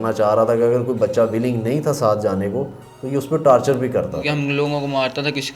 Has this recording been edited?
yes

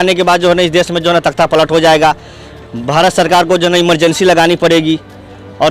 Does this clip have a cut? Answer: no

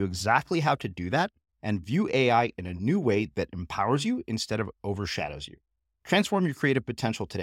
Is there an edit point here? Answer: no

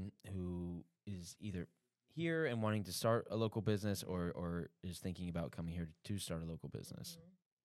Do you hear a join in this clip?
no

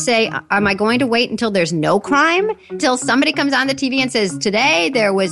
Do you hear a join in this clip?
yes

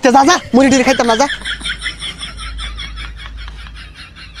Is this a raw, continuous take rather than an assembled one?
no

